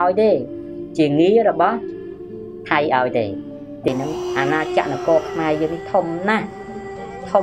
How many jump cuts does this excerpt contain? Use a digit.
1